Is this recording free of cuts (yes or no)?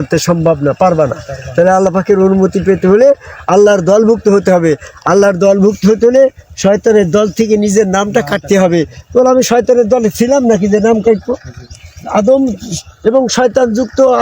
yes